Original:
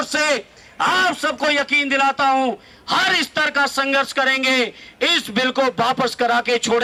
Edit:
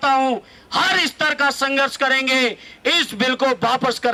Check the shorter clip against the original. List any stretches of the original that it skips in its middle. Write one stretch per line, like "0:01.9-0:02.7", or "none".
none